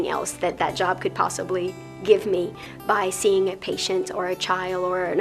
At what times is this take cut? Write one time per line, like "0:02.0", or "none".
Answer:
none